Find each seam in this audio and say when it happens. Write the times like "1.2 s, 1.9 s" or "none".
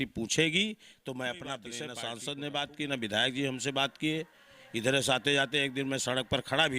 1.8 s